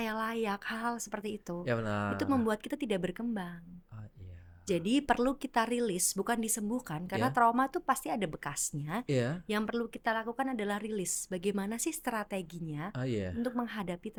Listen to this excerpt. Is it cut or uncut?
uncut